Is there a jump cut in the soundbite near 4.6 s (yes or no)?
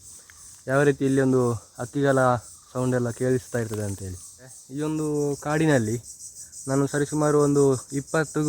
yes